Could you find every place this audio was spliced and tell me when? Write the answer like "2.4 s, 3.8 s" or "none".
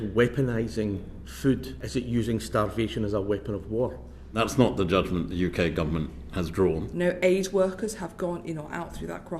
1.8 s, 6.9 s